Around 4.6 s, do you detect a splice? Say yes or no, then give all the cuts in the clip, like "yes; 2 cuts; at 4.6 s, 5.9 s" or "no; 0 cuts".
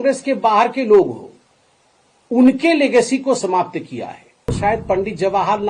yes; 1 cut; at 4.6 s